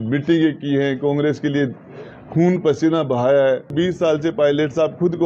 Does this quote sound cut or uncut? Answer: cut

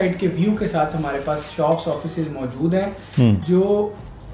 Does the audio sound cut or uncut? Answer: uncut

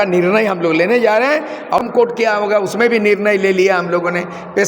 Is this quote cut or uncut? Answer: cut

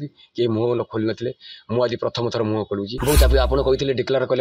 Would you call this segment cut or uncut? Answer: cut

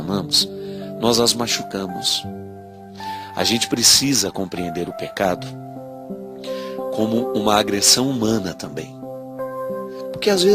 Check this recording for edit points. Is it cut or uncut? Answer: cut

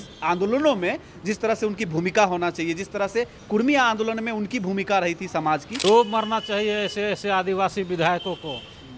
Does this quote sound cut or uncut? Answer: cut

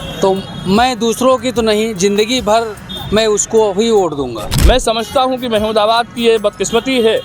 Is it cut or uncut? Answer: cut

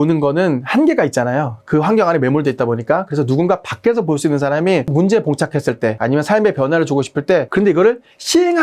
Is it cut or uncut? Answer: cut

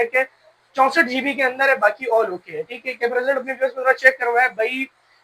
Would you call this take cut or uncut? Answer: uncut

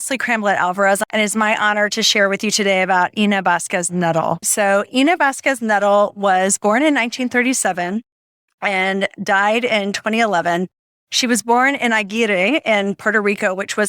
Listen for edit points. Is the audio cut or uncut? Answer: cut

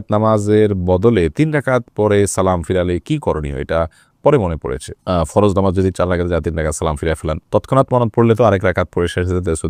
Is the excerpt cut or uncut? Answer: uncut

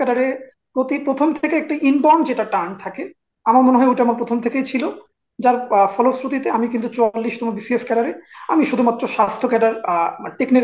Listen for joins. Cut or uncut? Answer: uncut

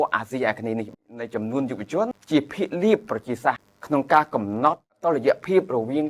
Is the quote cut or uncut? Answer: cut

